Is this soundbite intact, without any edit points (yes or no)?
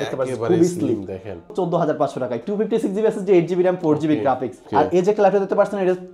no